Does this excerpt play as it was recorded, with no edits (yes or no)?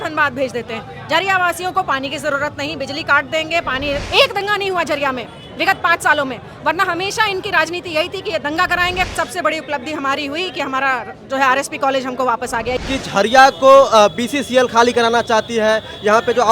no